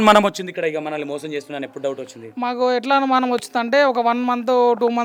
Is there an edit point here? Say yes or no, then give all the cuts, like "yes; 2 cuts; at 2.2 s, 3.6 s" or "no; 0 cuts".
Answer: no; 0 cuts